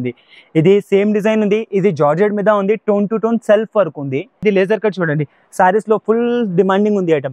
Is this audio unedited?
no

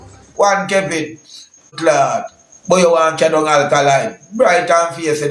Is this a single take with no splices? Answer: no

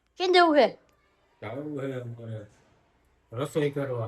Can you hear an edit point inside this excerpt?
no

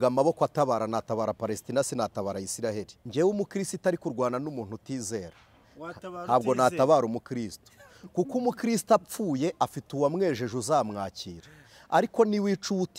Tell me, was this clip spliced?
yes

